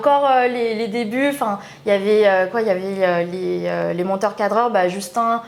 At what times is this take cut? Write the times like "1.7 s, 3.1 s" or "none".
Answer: none

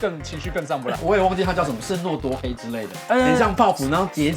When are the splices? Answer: 1.0 s

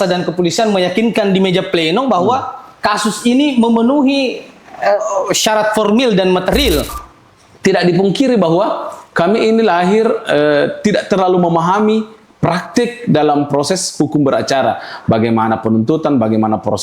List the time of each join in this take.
7.0 s

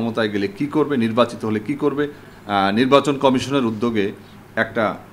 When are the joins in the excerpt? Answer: 2.2 s

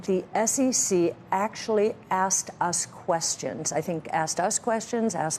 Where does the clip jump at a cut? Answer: none

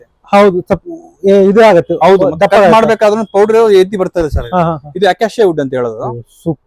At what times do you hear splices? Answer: none

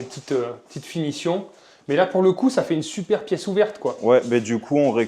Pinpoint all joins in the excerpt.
none

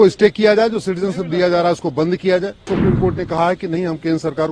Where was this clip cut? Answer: 2.7 s

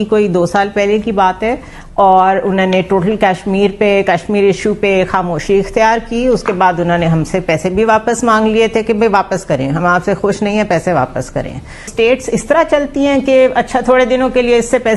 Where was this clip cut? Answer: 11.9 s

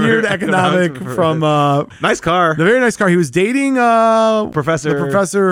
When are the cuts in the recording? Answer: 1.9 s, 4.5 s

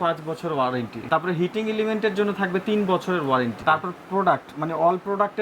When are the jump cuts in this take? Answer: 1.0 s, 3.6 s

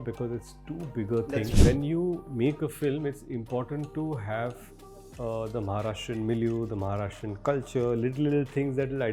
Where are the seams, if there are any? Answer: 1.5 s

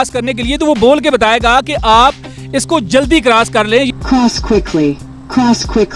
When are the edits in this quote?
3.9 s

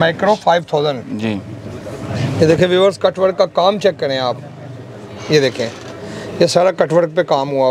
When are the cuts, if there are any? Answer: none

